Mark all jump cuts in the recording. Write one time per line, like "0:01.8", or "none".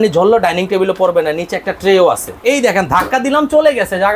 0:02.4